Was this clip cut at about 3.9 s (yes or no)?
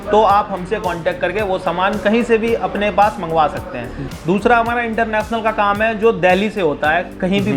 yes